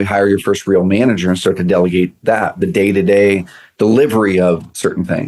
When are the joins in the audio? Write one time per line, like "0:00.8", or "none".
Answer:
none